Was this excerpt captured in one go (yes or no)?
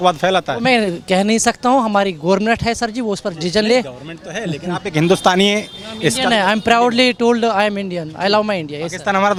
yes